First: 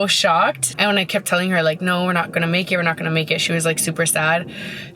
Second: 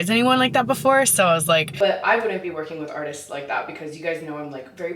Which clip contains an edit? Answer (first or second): second